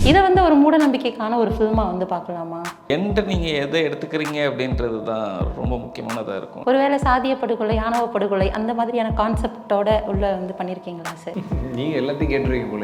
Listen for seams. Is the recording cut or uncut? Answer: cut